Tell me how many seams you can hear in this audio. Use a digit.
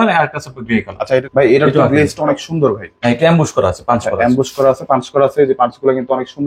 1